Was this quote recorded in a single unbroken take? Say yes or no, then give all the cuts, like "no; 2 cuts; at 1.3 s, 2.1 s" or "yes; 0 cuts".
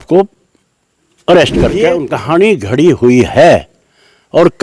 no; 1 cut; at 2.0 s